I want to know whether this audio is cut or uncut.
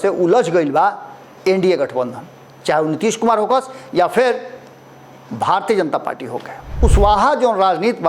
cut